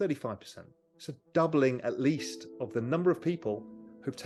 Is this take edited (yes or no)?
no